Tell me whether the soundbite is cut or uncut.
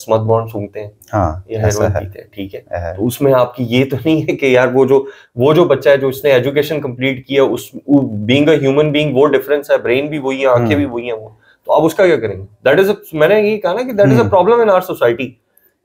uncut